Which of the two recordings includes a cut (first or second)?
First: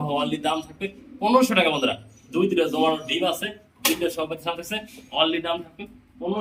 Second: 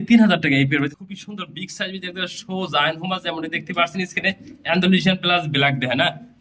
second